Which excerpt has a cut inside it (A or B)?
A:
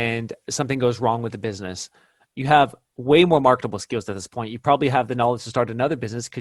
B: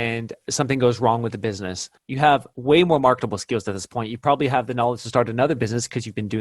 B